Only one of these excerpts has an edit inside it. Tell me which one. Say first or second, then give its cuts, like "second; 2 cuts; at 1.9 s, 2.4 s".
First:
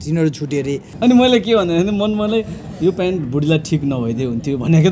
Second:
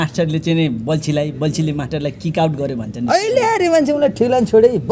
first; 1 cut; at 0.9 s